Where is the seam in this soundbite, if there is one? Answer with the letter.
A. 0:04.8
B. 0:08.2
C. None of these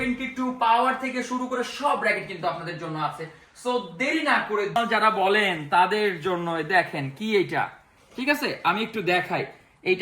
A